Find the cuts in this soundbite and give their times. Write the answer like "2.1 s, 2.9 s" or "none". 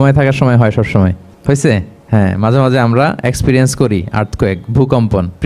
1.3 s, 1.9 s